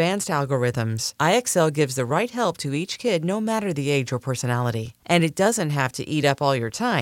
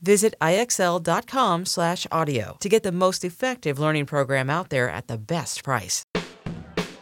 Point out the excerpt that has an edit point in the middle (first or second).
second